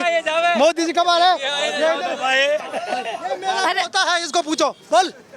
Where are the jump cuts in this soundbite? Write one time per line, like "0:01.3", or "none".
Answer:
none